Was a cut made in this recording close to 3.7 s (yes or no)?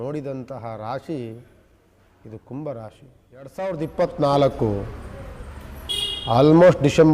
yes